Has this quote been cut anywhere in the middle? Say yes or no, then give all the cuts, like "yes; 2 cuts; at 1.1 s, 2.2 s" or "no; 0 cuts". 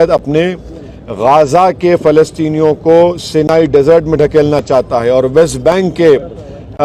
no; 0 cuts